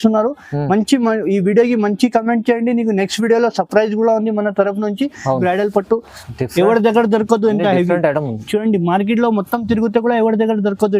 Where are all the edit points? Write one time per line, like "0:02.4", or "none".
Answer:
0:05.4